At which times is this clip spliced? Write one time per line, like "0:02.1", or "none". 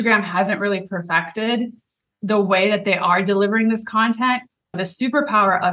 none